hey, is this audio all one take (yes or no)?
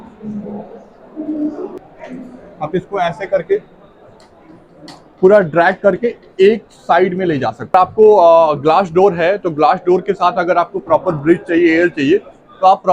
no